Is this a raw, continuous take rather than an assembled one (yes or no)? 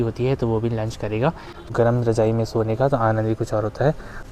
no